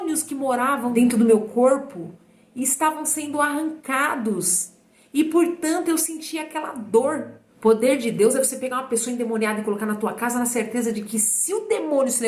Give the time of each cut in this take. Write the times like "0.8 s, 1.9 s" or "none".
1.0 s, 7.4 s

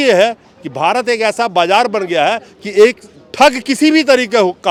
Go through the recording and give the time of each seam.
none

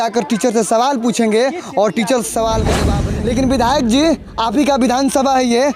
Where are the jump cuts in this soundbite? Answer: 2.9 s

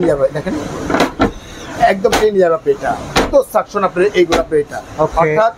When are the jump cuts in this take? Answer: none

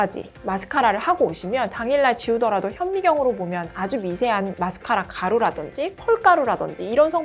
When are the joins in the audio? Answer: none

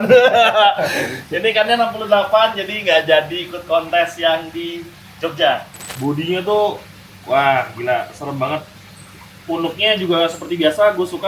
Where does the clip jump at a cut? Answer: 5.8 s

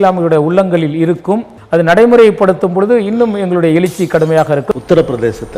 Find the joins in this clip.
1.5 s, 4.7 s

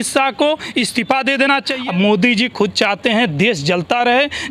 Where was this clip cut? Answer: 1.7 s

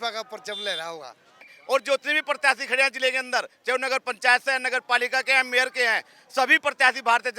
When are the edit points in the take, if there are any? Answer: 1.5 s

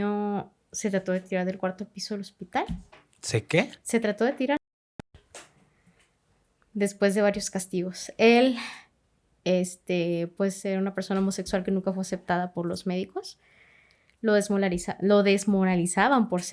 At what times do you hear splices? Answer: none

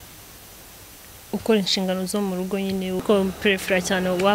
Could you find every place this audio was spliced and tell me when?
3.0 s

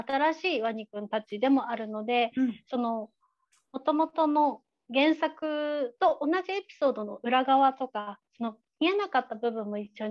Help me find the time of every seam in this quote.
none

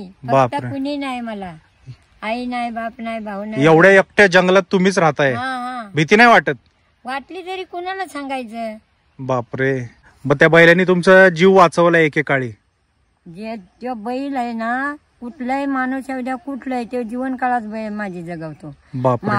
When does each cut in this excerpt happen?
none

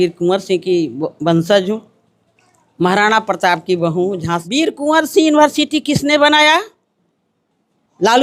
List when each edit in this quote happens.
4.4 s

